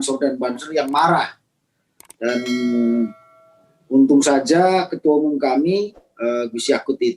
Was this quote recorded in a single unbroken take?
yes; 0 cuts

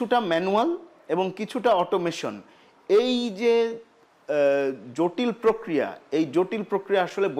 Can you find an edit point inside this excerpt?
no; 0 cuts

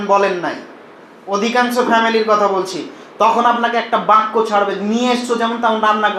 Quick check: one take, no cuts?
yes; 0 cuts

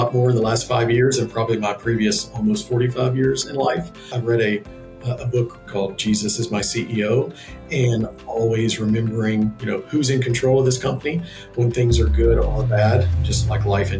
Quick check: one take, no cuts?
no; 2 cuts; at 4.0 s, 5.7 s

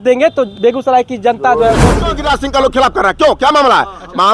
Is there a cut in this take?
yes; 1 cut; at 2.1 s

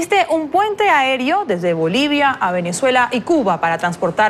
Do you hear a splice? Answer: no; 0 cuts

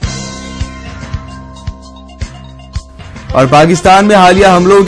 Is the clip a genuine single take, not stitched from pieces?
no; 1 cut; at 1.9 s

